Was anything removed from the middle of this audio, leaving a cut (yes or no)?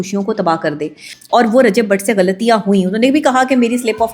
yes